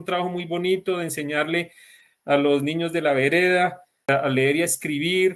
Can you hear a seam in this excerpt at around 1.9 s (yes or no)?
no